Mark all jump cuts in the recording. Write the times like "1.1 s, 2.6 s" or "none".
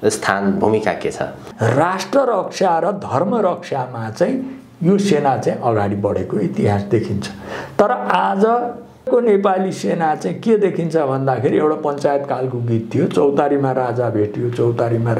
1.4 s, 9.1 s